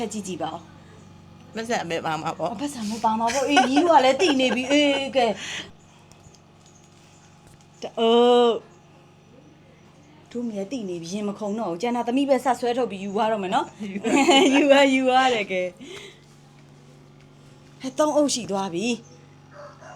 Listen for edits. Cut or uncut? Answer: cut